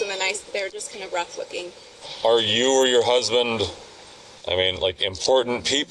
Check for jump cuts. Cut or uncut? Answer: cut